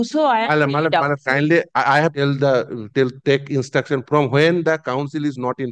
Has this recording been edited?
yes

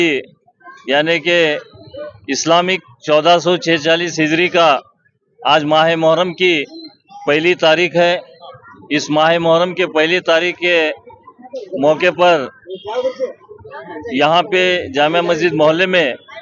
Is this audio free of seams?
yes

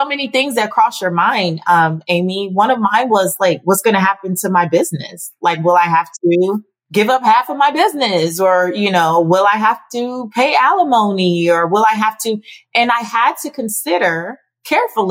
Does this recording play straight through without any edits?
no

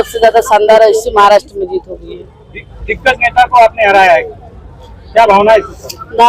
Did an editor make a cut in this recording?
no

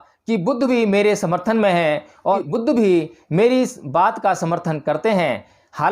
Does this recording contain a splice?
yes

